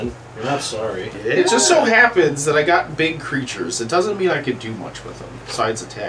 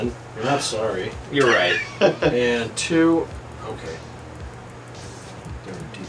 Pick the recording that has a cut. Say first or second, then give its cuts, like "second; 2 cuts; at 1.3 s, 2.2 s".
first; 1 cut; at 1.2 s